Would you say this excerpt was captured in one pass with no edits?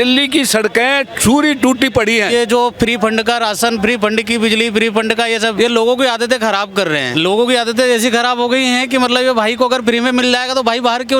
no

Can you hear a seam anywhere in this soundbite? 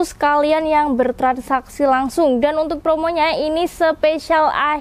no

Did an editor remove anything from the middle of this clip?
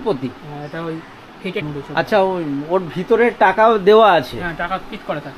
yes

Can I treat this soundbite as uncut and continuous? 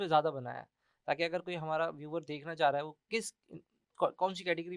yes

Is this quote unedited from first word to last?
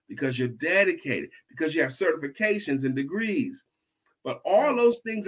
no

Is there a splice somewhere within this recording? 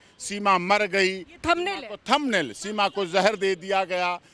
no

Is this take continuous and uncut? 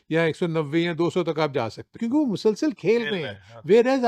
no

